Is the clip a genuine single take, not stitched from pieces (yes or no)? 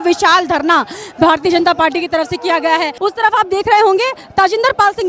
no